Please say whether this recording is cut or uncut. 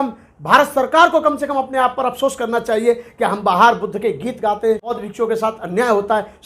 cut